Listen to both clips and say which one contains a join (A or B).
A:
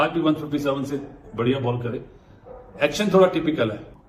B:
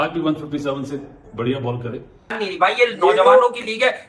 B